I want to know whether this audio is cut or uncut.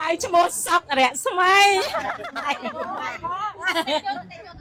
uncut